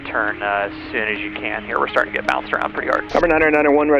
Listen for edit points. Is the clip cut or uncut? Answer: cut